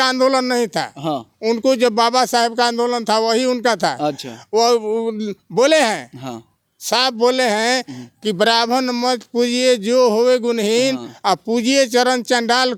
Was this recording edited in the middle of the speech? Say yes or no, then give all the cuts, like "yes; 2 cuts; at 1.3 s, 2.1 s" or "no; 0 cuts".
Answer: no; 0 cuts